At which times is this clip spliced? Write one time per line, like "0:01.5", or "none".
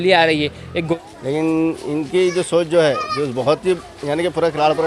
0:00.9